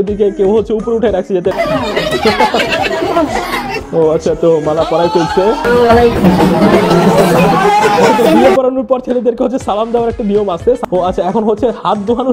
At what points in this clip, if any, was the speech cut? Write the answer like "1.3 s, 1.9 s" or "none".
1.5 s, 5.7 s, 10.8 s